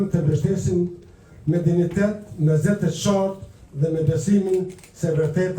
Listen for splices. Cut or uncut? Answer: uncut